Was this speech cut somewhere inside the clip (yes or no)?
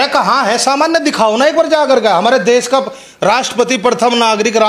no